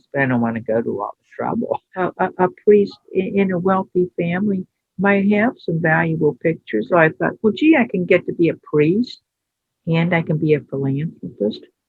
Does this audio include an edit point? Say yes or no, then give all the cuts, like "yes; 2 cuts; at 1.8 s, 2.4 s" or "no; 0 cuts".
yes; 2 cuts; at 1.9 s, 6.9 s